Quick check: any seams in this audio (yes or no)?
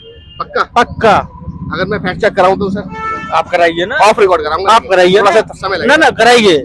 no